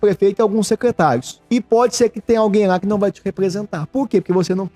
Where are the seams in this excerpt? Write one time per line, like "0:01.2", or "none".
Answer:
0:01.3